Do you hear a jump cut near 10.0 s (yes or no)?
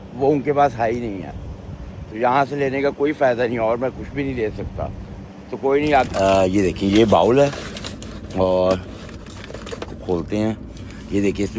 no